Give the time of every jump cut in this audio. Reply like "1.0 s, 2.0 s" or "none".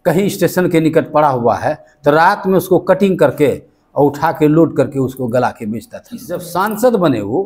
6.5 s